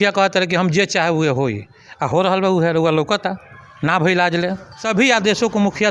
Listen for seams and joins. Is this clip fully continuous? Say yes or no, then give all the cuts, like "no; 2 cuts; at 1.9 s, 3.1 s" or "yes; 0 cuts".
no; 1 cut; at 4.8 s